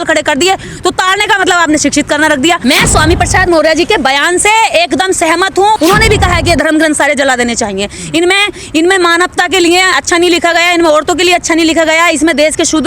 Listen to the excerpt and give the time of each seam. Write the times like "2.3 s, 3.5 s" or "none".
2.6 s, 5.8 s